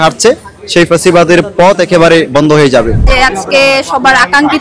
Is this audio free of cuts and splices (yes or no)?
no